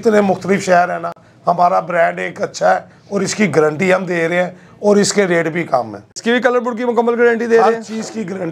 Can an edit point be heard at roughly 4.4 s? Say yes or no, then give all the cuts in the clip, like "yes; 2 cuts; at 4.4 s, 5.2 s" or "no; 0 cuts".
no; 1 cut; at 6.1 s